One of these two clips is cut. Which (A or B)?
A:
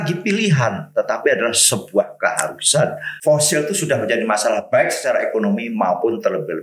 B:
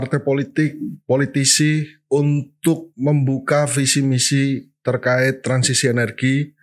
A